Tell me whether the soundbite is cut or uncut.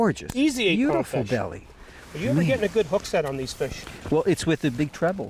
uncut